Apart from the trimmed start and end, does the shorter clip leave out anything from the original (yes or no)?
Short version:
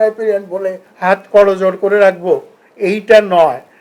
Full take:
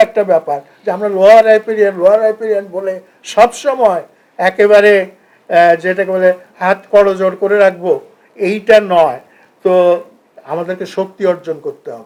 yes